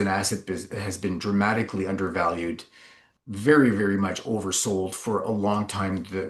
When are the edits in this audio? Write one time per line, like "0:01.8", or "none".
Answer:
0:03.1